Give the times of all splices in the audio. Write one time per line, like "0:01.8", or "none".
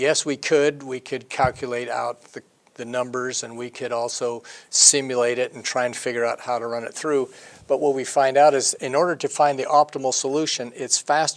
0:03.8